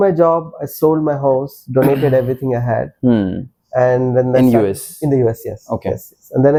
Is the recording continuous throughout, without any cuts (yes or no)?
yes